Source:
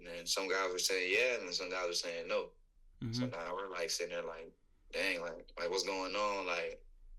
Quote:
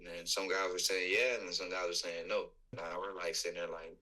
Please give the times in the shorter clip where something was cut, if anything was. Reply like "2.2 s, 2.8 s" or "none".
2.8 s